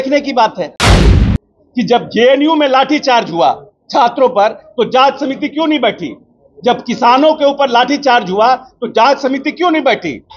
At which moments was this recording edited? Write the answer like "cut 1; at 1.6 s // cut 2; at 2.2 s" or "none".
cut 1; at 1.2 s

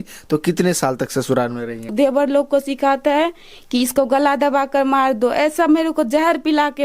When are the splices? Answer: cut 1; at 1.8 s

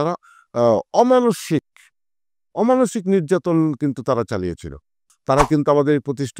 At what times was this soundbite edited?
cut 1; at 5.0 s

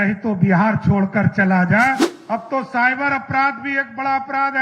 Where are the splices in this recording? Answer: cut 1; at 2.1 s

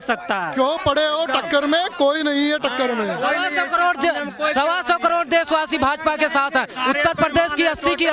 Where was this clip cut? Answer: none

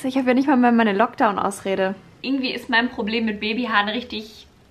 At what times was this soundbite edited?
cut 1; at 2.2 s

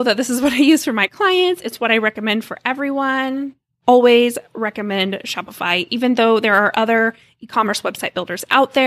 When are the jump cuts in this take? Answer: cut 1; at 3.6 s

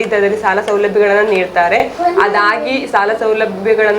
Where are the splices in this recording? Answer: none

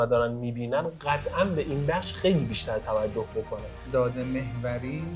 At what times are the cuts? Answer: cut 1; at 3.8 s

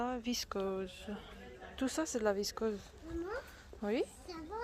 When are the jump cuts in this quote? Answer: none

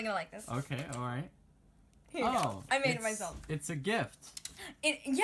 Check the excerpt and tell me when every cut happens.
cut 1; at 4.0 s

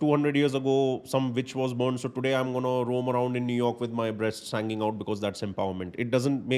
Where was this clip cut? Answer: none

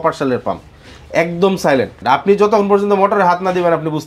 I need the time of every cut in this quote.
cut 1; at 2.0 s

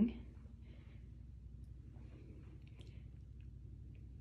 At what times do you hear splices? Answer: none

